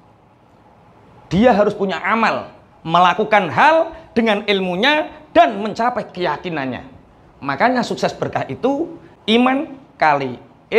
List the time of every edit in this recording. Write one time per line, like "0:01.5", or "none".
0:09.1